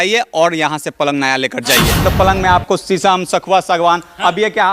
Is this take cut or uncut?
cut